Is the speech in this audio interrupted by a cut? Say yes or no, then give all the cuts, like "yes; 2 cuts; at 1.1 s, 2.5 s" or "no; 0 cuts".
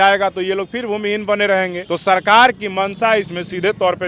yes; 1 cut; at 1.8 s